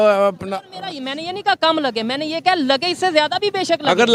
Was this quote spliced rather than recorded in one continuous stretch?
no; 0 cuts

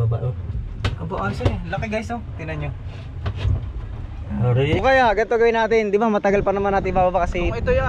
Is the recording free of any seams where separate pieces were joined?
no; 1 cut; at 4.8 s

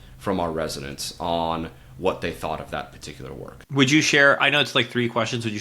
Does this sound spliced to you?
yes; 1 cut; at 3.6 s

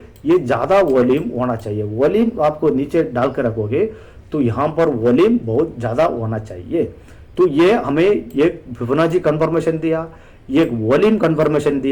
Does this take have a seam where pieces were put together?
no; 0 cuts

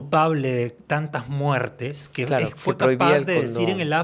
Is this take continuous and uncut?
yes; 0 cuts

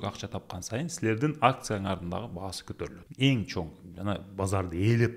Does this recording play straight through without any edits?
no; 1 cut; at 3.0 s

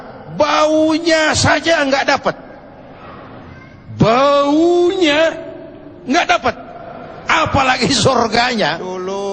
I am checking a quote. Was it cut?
yes; 1 cut; at 8.4 s

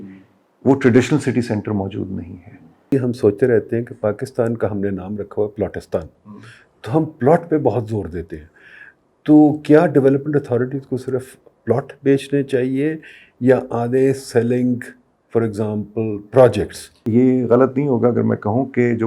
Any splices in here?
yes; 2 cuts; at 2.9 s, 17.0 s

